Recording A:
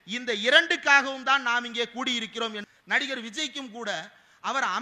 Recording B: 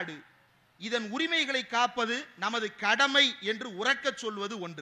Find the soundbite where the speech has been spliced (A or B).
A